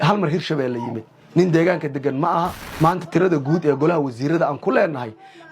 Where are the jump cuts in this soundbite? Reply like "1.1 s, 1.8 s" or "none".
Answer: 2.6 s